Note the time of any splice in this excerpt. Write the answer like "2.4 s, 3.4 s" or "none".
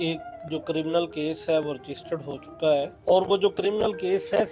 2.9 s